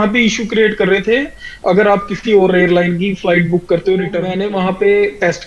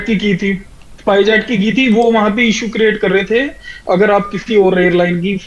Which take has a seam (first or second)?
first